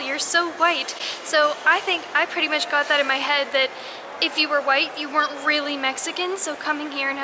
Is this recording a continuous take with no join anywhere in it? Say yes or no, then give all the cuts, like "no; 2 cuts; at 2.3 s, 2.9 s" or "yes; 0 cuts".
yes; 0 cuts